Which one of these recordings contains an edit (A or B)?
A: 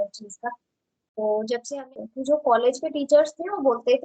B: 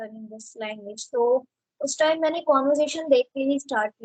A